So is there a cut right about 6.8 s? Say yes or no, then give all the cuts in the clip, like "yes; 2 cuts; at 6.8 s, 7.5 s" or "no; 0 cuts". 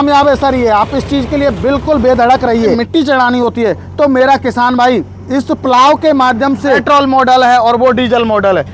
yes; 2 cuts; at 2.8 s, 6.8 s